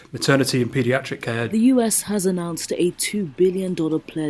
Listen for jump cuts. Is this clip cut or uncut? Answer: cut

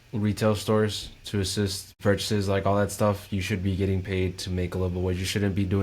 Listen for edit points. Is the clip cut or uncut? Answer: cut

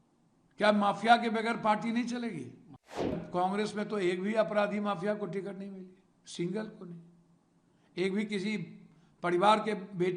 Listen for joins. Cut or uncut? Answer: cut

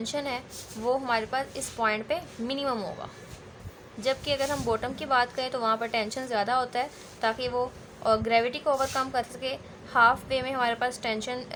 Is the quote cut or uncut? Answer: uncut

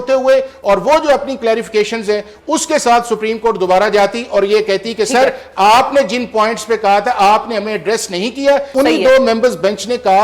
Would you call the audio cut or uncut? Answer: cut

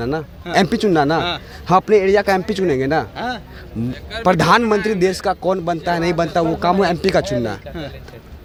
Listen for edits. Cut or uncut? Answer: uncut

